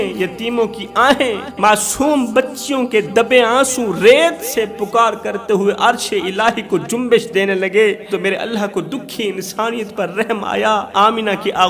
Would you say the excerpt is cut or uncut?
cut